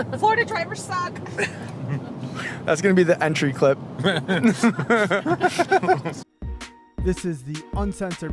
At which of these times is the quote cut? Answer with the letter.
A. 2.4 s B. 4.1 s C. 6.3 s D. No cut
C